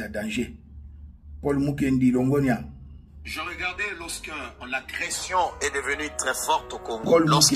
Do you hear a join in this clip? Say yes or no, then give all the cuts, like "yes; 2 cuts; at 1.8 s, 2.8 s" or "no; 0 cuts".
no; 0 cuts